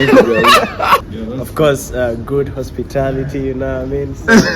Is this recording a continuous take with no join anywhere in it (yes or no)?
no